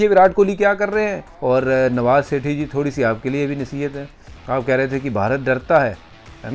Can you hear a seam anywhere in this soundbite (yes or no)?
yes